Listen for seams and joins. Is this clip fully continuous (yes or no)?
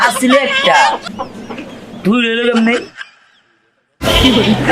yes